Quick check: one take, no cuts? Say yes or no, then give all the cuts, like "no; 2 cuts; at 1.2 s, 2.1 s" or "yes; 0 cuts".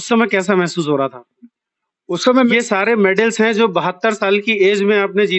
no; 1 cut; at 2.5 s